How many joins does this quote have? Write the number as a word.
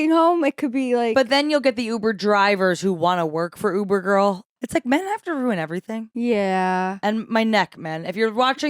one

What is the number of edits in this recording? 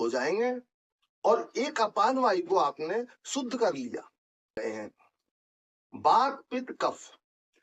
one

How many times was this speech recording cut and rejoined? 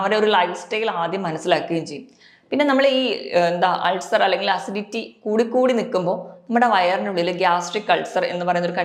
zero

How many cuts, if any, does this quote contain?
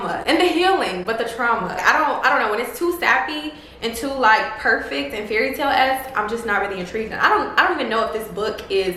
zero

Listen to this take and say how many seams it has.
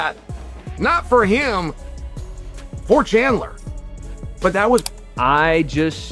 one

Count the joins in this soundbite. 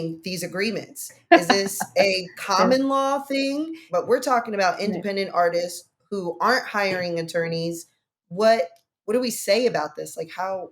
one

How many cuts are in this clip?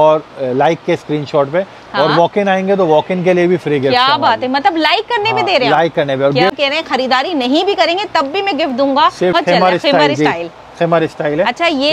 two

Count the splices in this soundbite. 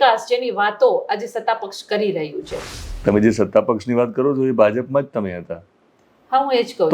one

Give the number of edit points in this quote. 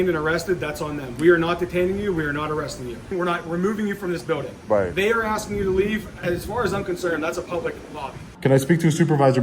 three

